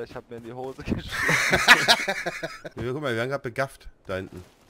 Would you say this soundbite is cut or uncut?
cut